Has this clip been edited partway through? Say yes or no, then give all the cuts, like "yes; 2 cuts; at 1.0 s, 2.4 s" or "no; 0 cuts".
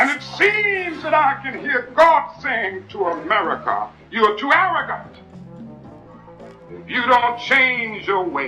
no; 0 cuts